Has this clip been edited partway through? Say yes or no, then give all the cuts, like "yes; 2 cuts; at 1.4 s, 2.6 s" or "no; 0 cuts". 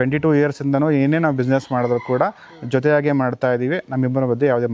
no; 0 cuts